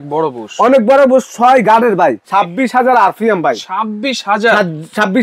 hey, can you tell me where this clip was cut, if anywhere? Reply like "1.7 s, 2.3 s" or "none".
2.2 s